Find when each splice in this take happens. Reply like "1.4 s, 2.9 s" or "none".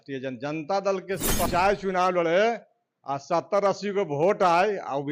1.5 s